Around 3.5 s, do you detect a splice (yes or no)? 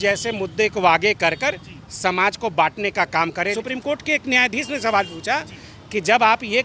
yes